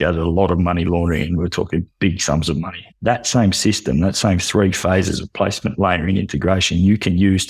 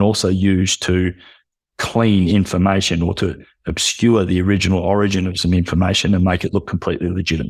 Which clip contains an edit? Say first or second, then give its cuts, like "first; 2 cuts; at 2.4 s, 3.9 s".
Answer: first; 1 cut; at 2.8 s